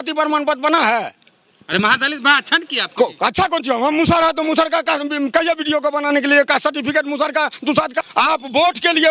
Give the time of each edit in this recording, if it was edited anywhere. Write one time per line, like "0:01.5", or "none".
none